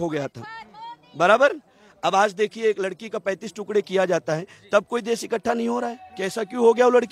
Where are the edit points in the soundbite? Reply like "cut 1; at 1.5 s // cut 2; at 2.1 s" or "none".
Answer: none